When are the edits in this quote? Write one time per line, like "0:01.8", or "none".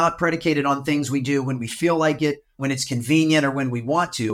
0:02.6